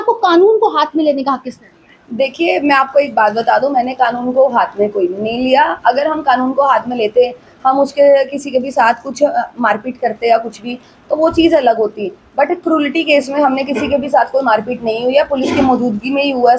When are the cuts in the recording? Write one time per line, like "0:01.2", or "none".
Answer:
none